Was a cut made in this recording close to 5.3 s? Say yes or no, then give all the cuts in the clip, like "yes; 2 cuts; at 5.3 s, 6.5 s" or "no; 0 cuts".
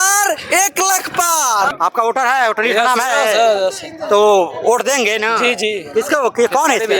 no; 1 cut; at 1.7 s